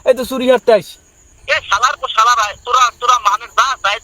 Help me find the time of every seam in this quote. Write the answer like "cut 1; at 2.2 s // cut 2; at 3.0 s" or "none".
cut 1; at 1.3 s